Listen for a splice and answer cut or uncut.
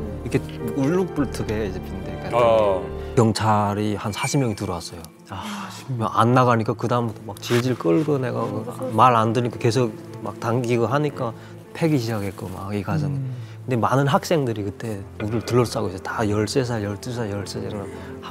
cut